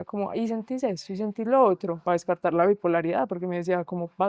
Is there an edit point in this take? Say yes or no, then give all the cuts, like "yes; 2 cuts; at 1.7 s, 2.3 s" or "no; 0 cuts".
no; 0 cuts